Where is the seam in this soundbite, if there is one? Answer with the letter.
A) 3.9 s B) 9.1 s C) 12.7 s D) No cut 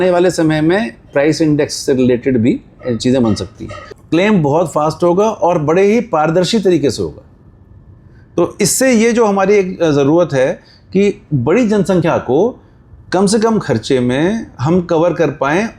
A